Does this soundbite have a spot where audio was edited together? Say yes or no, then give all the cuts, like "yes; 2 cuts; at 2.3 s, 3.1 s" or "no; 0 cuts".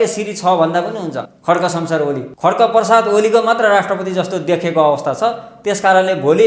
yes; 2 cuts; at 1.3 s, 2.3 s